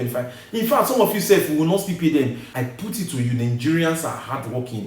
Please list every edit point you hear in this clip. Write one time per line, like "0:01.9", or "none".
0:02.4